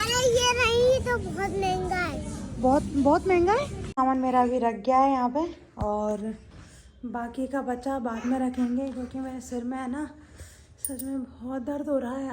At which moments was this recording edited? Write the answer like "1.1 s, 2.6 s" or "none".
4.0 s